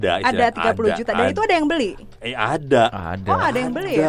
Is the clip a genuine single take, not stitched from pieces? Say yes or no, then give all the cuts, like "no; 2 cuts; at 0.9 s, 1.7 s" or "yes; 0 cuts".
yes; 0 cuts